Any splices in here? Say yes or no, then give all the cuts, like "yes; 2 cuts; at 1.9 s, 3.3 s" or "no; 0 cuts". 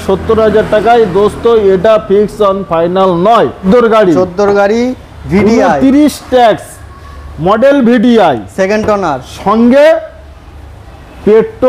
yes; 1 cut; at 3.6 s